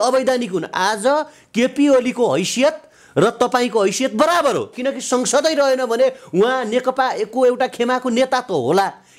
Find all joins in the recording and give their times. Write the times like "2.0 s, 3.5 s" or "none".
none